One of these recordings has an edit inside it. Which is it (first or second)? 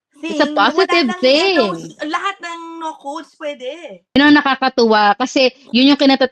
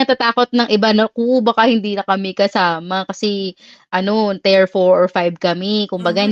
first